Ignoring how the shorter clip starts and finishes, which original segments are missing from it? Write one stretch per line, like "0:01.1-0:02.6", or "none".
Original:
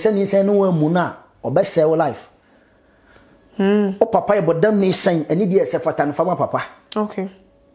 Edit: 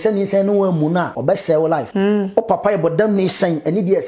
0:01.1-0:01.4
0:02.2-0:03.5